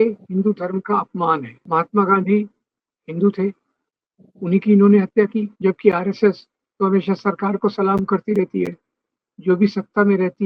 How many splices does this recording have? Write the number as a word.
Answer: two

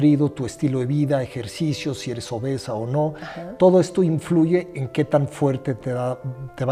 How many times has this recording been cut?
zero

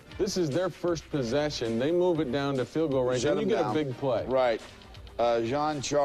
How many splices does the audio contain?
one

